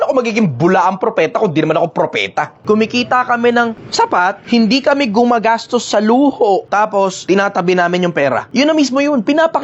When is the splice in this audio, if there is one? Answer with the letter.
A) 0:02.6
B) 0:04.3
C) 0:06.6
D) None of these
A